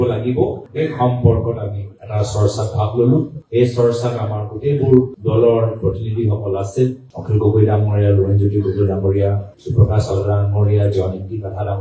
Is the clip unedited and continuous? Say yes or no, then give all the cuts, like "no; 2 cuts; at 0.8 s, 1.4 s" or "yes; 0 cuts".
yes; 0 cuts